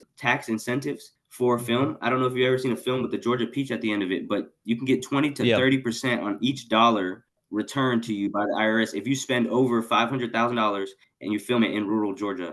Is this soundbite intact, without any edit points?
yes; 0 cuts

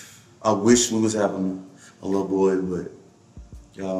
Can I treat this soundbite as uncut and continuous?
yes; 0 cuts

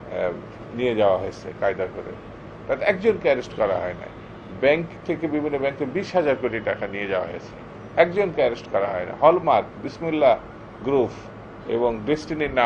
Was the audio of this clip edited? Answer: no; 0 cuts

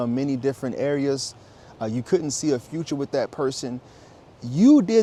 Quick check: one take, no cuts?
yes; 0 cuts

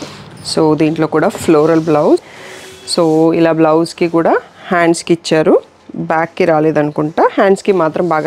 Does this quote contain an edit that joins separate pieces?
yes; 1 cut; at 2.4 s

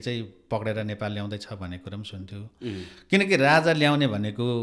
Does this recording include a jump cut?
no; 0 cuts

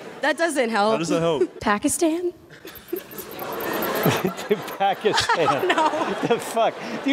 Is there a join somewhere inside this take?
yes; 1 cut; at 1.6 s

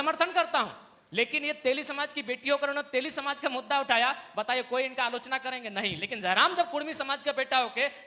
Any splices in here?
no; 0 cuts

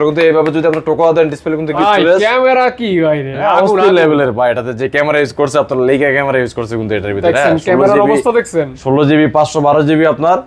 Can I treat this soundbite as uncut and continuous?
no; 1 cut; at 1.8 s

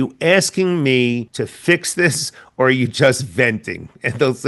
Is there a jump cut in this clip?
yes; 1 cut; at 1.3 s

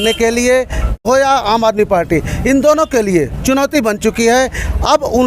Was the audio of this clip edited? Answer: yes; 1 cut; at 1.0 s

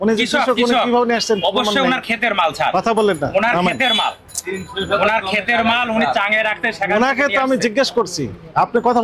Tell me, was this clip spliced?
no; 0 cuts

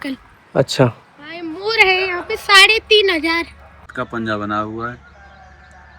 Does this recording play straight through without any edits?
no; 1 cut; at 3.8 s

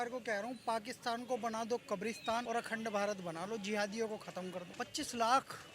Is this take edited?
yes; 2 cuts; at 2.4 s, 4.7 s

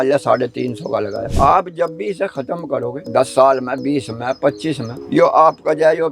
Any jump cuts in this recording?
yes; 2 cuts; at 1.2 s, 3.0 s

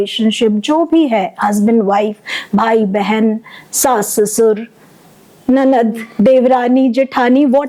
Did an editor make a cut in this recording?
no; 0 cuts

